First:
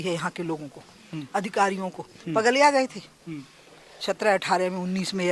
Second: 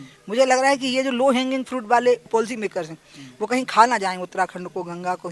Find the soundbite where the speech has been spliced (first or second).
second